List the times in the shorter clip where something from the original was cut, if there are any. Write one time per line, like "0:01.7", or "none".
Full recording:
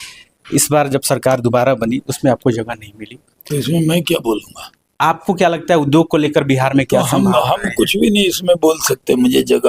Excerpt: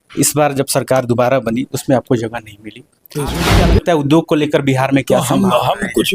0:03.4